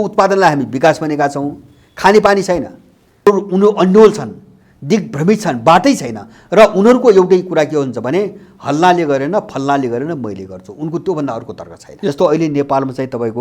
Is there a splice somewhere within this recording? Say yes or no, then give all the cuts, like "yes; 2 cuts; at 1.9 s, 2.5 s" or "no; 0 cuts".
yes; 2 cuts; at 3.3 s, 12.1 s